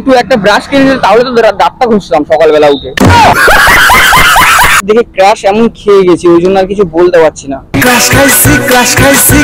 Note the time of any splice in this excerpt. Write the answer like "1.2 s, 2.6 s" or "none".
2.8 s, 4.8 s